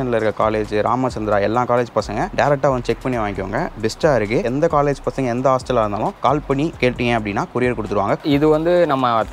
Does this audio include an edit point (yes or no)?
yes